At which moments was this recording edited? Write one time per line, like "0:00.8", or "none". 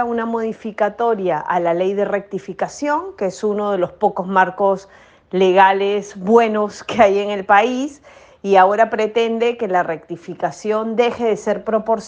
none